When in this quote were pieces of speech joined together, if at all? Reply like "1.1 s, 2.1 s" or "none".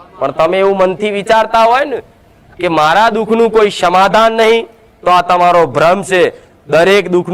none